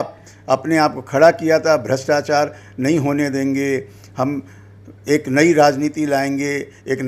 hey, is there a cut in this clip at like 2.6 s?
no; 0 cuts

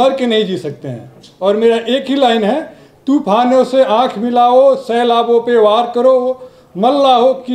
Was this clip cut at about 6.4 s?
no; 0 cuts

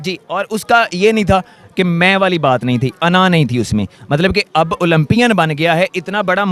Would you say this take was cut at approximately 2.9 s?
no; 0 cuts

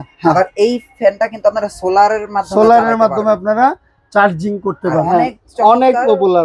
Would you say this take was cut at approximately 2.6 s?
no; 1 cut; at 5.0 s

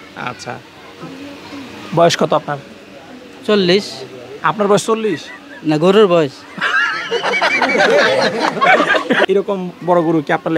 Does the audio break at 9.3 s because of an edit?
yes; 1 cut; at 9.3 s

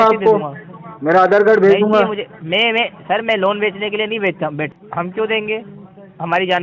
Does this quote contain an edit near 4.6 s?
yes; 1 cut; at 4.6 s

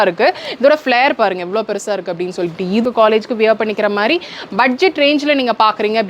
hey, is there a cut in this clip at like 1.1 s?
no; 1 cut; at 2.8 s

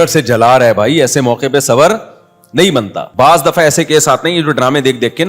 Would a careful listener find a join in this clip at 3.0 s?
yes; 1 cut; at 3.0 s

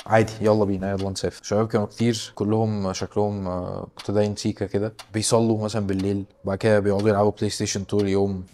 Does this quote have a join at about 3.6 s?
no; 2 cuts; at 1.4 s, 2.3 s

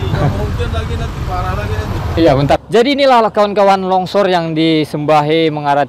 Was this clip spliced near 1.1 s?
no; 1 cut; at 2.6 s

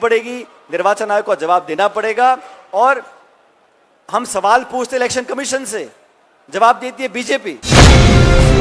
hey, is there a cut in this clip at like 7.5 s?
yes; 1 cut; at 7.5 s

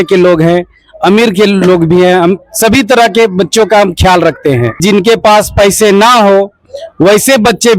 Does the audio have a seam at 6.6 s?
no; 1 cut; at 4.8 s

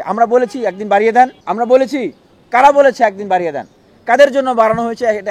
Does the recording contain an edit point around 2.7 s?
no; 1 cut; at 1.4 s

